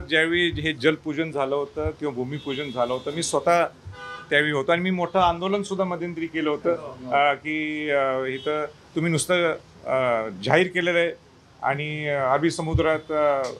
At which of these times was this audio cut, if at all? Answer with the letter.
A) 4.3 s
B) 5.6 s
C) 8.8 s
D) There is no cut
D